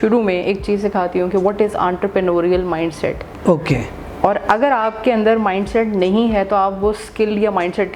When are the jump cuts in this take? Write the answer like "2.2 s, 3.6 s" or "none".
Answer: none